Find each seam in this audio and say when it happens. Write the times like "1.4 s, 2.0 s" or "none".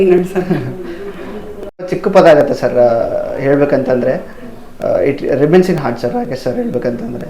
2.0 s